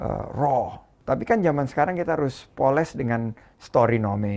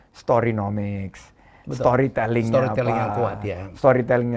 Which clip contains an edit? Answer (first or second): first